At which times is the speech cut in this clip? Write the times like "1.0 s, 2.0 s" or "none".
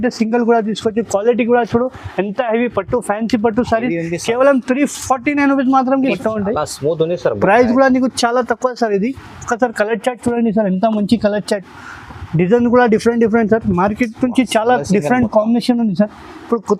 6.1 s